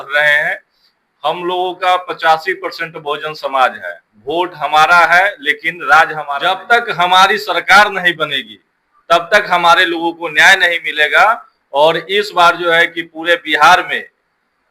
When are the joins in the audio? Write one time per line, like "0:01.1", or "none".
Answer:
0:06.3